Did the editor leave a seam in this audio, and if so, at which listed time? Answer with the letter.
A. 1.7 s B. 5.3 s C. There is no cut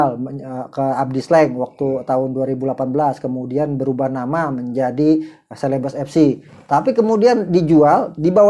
C